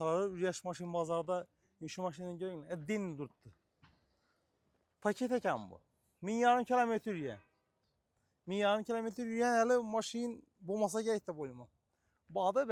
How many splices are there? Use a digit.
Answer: 0